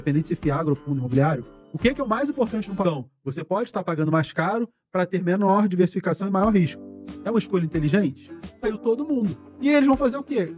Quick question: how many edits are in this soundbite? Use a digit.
2